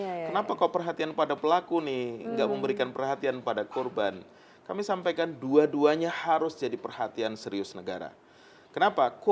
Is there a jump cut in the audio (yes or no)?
no